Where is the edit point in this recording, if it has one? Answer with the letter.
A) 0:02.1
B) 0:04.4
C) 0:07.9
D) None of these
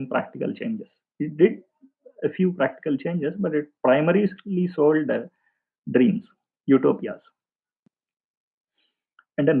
D